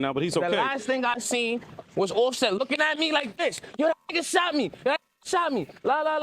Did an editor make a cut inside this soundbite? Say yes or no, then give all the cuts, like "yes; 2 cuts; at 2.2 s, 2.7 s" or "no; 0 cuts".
no; 0 cuts